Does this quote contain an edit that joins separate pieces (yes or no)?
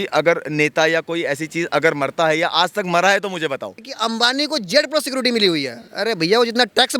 yes